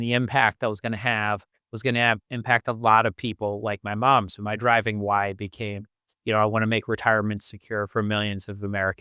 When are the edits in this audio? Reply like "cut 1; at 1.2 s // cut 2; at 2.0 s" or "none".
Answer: none